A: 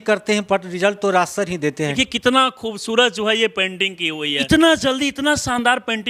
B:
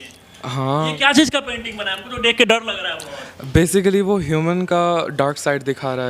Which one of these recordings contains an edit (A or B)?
A